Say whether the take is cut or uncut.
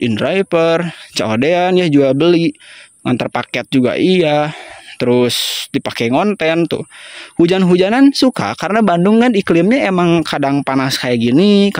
uncut